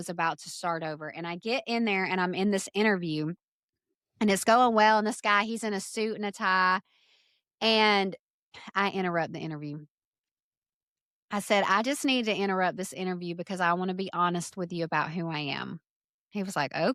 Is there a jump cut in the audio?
no; 0 cuts

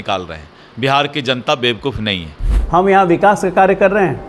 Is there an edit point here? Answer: yes; 1 cut; at 2.5 s

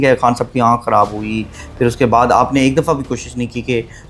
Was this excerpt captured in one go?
yes; 0 cuts

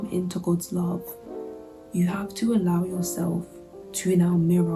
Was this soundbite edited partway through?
no; 0 cuts

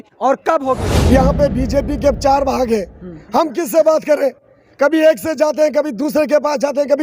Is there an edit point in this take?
yes; 1 cut; at 0.9 s

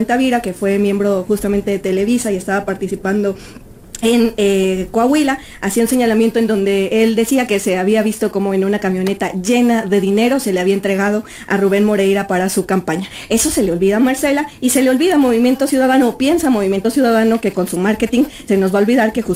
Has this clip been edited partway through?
no; 0 cuts

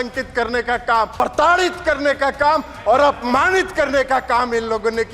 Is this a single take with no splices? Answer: no; 1 cut; at 1.1 s

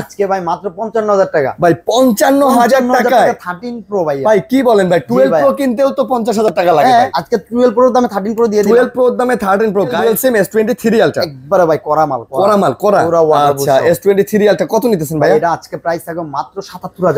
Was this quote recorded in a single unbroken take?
no; 2 cuts; at 7.2 s, 10.0 s

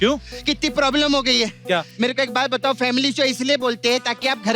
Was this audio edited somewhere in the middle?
yes; 1 cut; at 1.9 s

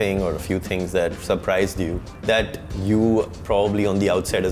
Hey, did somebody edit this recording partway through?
no; 0 cuts

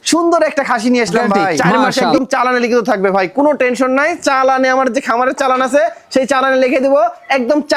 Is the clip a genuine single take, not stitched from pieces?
no; 1 cut; at 2.2 s

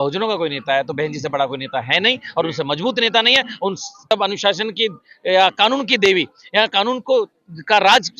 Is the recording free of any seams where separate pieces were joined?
no; 1 cut; at 4.1 s

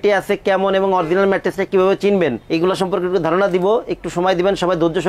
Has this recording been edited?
no; 0 cuts

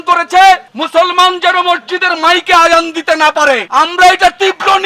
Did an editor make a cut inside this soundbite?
no; 0 cuts

